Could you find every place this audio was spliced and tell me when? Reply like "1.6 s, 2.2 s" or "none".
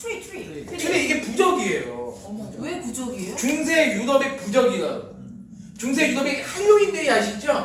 none